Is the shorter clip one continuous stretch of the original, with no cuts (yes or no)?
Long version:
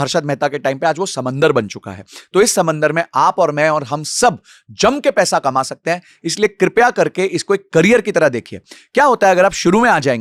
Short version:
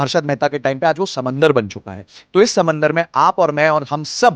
yes